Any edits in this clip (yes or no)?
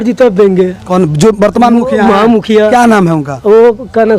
no